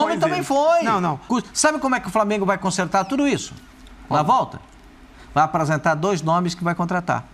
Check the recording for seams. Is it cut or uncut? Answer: cut